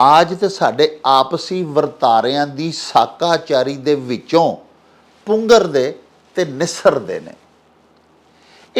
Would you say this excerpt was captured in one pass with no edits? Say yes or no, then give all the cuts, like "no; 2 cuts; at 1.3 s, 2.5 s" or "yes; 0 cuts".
yes; 0 cuts